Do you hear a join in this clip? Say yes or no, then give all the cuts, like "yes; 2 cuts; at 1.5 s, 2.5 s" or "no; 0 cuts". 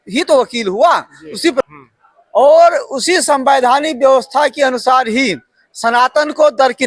yes; 1 cut; at 1.7 s